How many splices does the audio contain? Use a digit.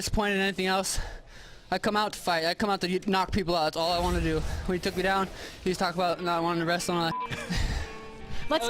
1